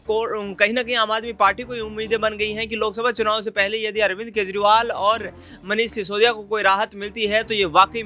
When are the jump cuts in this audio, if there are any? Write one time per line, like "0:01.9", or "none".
none